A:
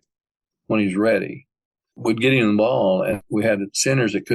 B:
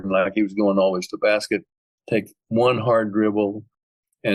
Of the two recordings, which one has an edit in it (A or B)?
A